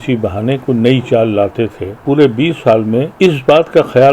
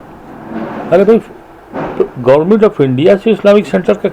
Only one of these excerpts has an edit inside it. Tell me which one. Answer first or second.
first